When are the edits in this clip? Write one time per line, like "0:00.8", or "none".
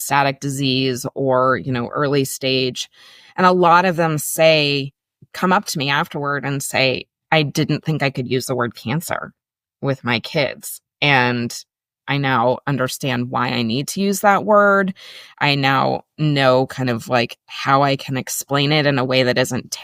none